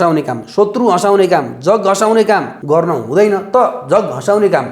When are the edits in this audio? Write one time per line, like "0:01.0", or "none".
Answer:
0:02.5